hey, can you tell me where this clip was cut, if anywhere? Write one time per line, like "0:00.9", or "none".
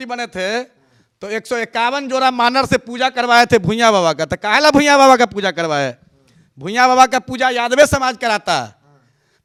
none